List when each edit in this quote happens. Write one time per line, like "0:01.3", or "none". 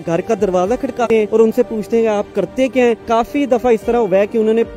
0:01.0
0:03.0